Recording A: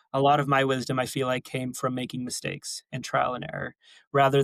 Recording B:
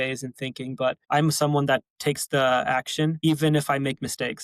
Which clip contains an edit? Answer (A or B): B